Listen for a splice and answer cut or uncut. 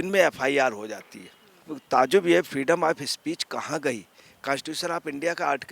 cut